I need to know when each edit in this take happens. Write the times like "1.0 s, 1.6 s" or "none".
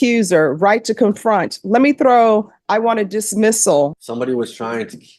3.9 s